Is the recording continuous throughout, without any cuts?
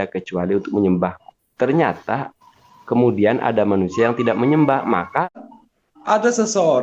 no; 1 cut; at 5.3 s

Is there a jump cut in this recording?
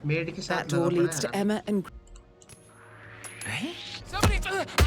yes; 1 cut; at 1.8 s

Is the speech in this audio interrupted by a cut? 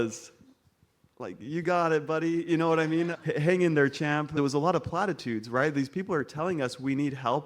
yes; 1 cut; at 4.3 s

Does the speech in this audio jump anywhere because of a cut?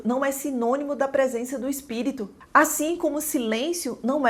no; 0 cuts

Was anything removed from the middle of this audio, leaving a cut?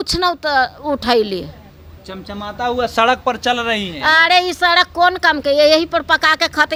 no; 0 cuts

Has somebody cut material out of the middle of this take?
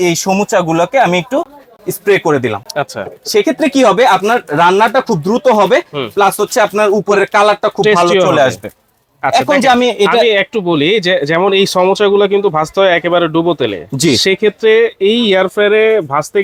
no; 0 cuts

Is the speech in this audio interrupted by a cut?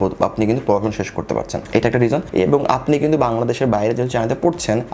yes; 1 cut; at 2.3 s

